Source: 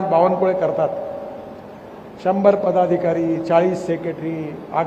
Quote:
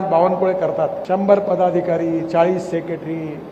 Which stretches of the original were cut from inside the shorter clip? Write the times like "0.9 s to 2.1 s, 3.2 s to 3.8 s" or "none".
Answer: 1.0 s to 2.1 s